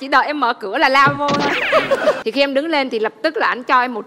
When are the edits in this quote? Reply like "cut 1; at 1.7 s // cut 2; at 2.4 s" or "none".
cut 1; at 2.2 s

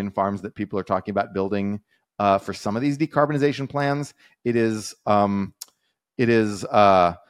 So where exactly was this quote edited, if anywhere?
none

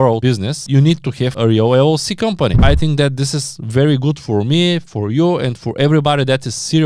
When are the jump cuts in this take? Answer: cut 1; at 2.6 s

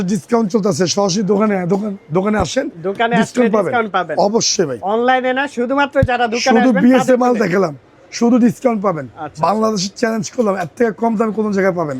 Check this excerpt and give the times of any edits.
none

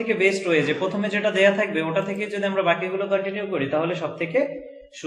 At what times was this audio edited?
none

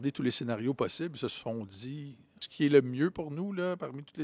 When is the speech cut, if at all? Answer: cut 1; at 2.4 s

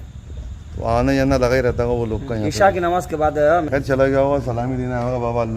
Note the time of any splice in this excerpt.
cut 1; at 3.7 s

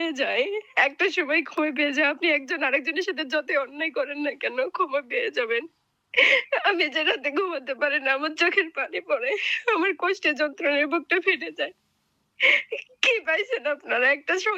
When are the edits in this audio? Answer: none

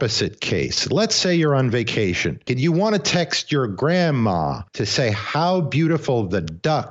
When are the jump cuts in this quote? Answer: cut 1; at 2.4 s // cut 2; at 4.6 s

